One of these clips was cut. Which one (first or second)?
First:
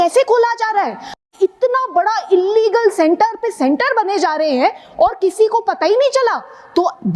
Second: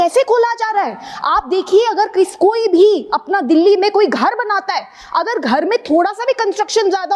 first